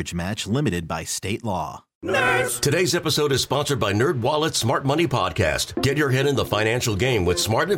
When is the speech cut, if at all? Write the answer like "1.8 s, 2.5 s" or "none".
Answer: 1.9 s

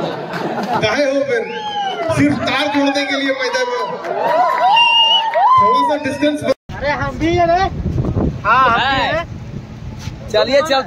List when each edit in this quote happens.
6.6 s

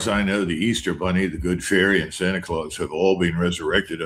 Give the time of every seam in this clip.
none

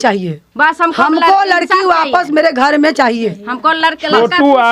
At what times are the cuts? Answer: none

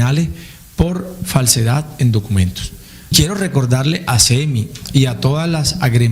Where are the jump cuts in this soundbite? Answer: 3.1 s

